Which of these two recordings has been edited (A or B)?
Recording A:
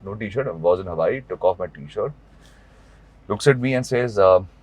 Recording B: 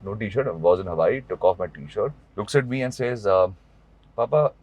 B